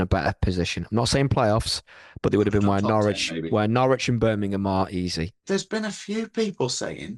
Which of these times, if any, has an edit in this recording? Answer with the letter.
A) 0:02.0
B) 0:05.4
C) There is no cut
B